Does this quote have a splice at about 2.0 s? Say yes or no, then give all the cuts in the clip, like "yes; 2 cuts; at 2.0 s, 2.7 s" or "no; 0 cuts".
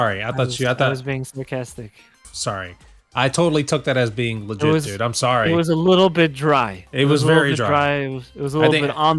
yes; 1 cut; at 2.0 s